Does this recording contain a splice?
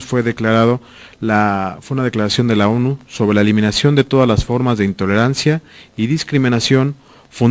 no; 0 cuts

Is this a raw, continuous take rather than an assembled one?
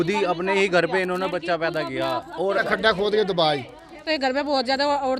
no; 2 cuts; at 2.6 s, 4.0 s

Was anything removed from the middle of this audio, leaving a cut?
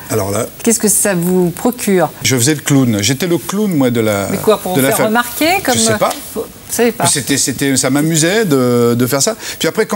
yes; 1 cut; at 2.3 s

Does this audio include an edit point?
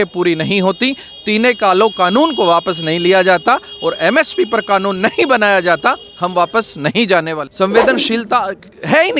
yes; 1 cut; at 7.4 s

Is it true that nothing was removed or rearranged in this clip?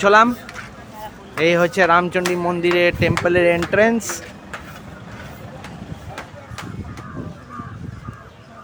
yes; 0 cuts

